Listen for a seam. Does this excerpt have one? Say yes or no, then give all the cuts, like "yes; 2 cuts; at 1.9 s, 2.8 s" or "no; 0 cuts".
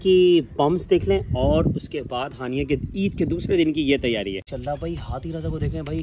yes; 1 cut; at 4.5 s